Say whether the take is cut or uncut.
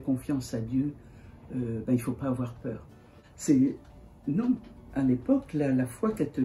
cut